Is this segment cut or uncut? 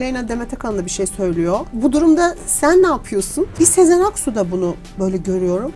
cut